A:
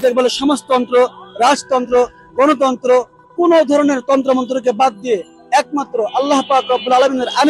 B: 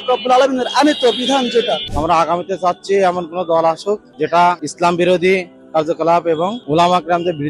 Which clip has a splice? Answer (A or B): B